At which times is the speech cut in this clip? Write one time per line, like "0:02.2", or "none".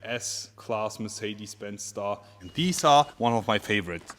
0:02.4